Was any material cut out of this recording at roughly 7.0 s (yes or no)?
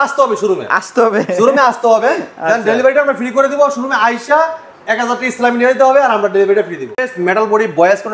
yes